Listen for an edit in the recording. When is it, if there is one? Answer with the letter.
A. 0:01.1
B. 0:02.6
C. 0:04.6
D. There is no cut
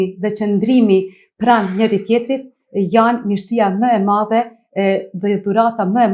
D